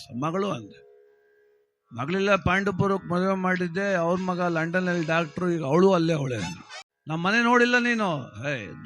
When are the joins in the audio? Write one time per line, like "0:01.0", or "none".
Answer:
0:06.5